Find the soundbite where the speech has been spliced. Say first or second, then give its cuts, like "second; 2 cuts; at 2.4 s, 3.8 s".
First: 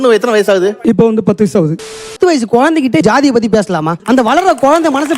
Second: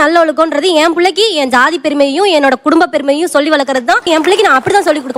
first; 2 cuts; at 1.8 s, 3.5 s